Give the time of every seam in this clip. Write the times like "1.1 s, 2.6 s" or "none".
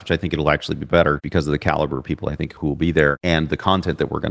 1.2 s, 3.2 s